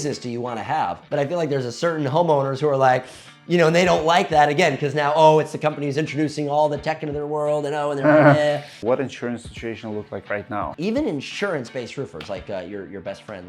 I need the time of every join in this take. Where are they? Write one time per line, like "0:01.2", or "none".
0:01.0
0:08.7
0:10.7